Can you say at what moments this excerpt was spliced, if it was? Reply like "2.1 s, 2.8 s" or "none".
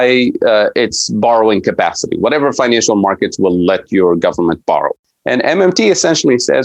4.9 s